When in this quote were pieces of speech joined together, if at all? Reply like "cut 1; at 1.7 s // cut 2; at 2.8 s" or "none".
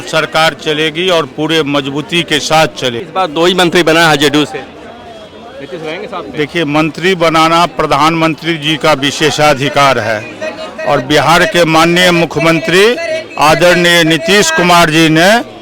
cut 1; at 3.0 s

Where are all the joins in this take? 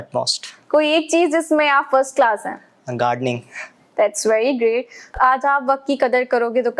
cut 1; at 5.2 s

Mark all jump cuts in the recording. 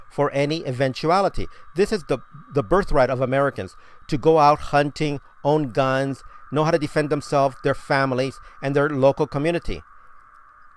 none

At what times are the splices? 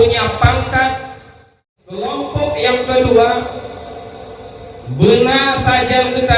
cut 1; at 2.2 s

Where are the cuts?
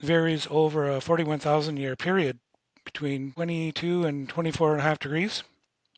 cut 1; at 3.3 s

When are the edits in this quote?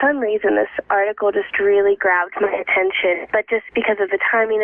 cut 1; at 2.7 s

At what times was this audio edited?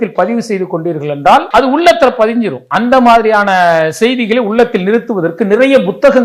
cut 1; at 1.5 s // cut 2; at 2.6 s

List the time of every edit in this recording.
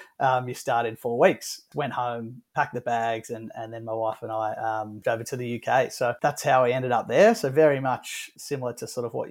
cut 1; at 1.6 s // cut 2; at 5.0 s // cut 3; at 6.2 s // cut 4; at 8.3 s

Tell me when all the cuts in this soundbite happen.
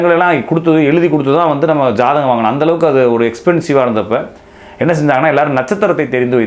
none

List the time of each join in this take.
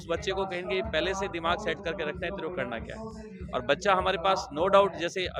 none

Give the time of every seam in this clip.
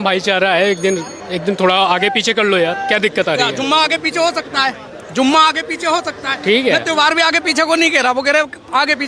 none

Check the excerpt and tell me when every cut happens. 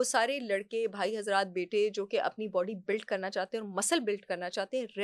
none

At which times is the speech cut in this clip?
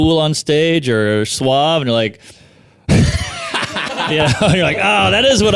none

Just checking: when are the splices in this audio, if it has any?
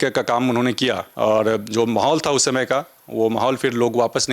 cut 1; at 1.1 s

